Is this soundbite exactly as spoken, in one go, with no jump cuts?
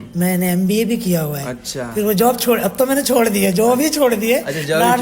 yes; 0 cuts

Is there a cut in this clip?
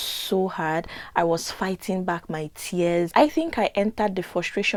no; 0 cuts

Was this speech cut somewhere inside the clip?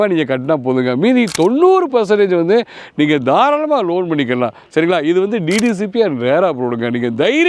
no; 0 cuts

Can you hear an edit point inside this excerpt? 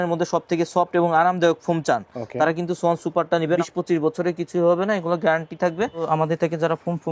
yes; 2 cuts; at 3.6 s, 6.0 s

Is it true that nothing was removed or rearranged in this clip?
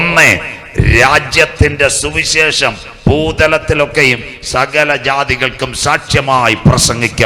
yes; 0 cuts

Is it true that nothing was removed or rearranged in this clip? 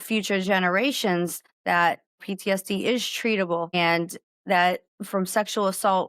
no; 4 cuts; at 1.5 s, 2.2 s, 3.7 s, 4.9 s

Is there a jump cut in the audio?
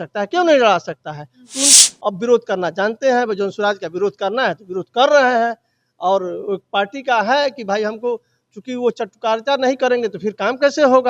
yes; 1 cut; at 1.7 s

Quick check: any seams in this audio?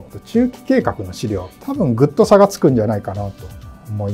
yes; 1 cut; at 1.6 s

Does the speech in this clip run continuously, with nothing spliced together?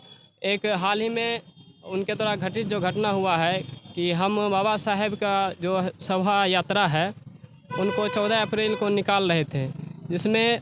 yes; 0 cuts

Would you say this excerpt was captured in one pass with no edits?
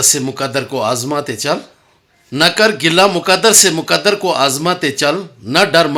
yes; 0 cuts

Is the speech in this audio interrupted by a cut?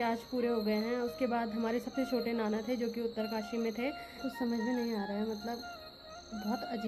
yes; 1 cut; at 4.1 s

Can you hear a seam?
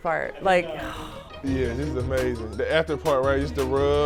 no; 0 cuts

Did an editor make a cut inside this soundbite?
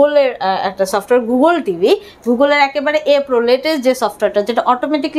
no; 0 cuts

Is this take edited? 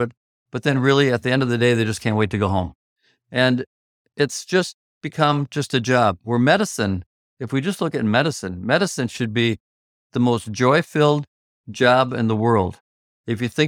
no; 0 cuts

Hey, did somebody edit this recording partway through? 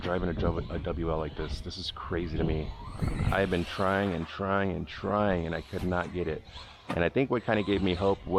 no; 0 cuts

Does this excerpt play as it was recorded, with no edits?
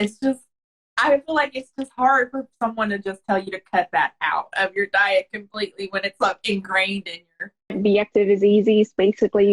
no; 1 cut; at 7.8 s

